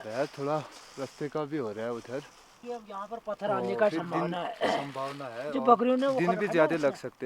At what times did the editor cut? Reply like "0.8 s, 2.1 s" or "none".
2.6 s